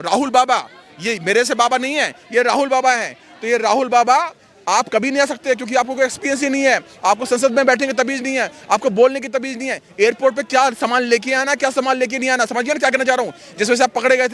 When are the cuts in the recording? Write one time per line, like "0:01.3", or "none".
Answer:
none